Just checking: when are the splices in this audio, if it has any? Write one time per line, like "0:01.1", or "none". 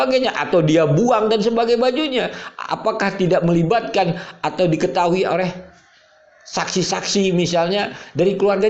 none